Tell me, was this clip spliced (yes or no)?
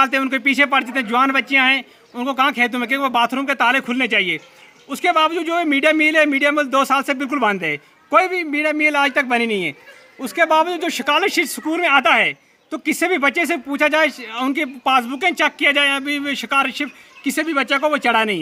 no